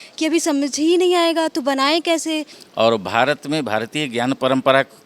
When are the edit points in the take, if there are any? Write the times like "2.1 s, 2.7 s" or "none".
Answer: 2.6 s